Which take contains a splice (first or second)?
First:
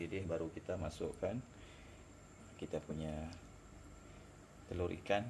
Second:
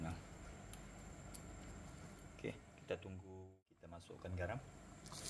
second